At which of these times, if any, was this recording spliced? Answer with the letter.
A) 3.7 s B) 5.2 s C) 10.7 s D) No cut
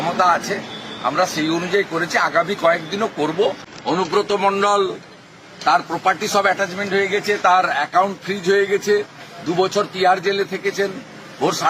A